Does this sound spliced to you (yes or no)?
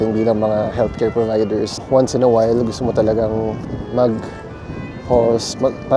yes